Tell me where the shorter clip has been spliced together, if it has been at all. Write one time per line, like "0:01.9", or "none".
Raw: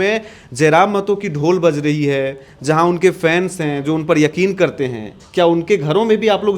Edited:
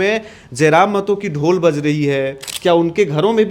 0:02.4